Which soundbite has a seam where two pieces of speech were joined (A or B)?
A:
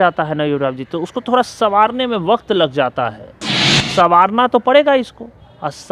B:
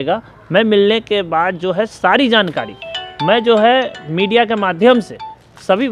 A